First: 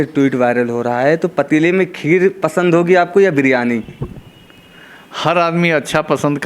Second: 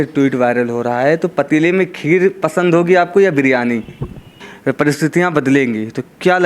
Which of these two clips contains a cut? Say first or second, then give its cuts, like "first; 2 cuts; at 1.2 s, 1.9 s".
second; 1 cut; at 4.5 s